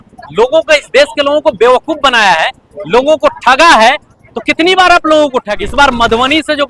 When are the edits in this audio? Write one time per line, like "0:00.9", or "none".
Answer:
0:05.6